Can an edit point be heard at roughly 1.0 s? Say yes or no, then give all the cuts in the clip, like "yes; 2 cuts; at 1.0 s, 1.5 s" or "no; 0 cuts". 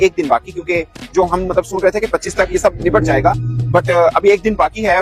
yes; 1 cut; at 1.0 s